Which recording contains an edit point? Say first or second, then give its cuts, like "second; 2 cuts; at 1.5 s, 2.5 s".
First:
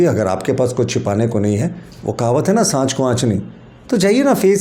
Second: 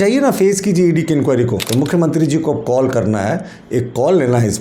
second; 1 cut; at 1.6 s